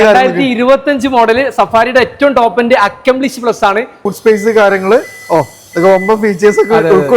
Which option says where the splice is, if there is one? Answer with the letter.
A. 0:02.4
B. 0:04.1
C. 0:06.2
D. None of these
B